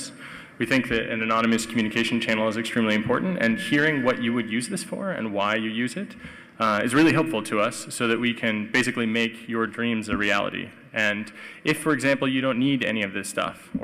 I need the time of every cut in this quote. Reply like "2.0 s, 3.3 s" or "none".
none